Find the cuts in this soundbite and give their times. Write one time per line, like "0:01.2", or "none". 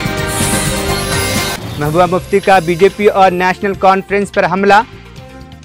none